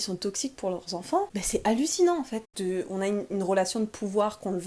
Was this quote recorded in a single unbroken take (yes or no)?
no